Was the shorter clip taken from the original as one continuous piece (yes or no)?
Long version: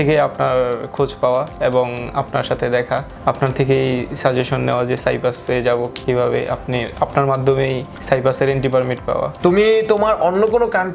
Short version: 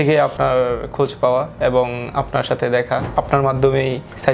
no